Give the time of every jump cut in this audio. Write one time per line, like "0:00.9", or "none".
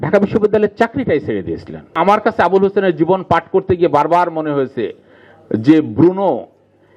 0:01.9